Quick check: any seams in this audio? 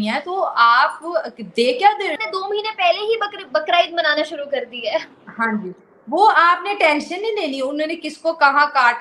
yes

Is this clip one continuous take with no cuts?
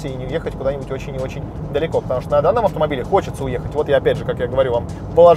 yes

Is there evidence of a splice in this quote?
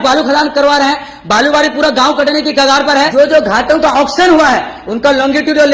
yes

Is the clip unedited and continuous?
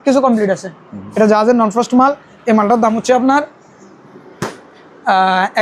yes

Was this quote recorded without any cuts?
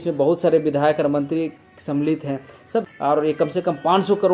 no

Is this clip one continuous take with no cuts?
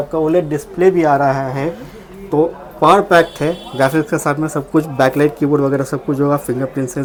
yes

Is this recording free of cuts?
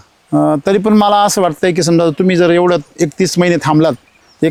yes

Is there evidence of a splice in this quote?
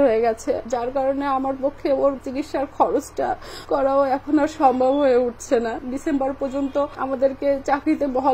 yes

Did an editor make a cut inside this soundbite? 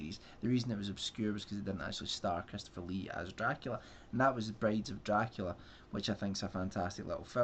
yes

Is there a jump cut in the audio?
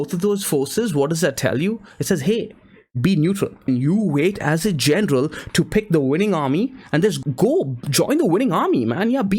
yes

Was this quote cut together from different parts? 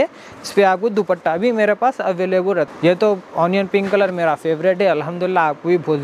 yes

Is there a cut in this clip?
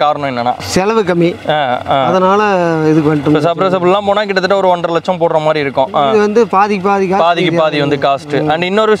no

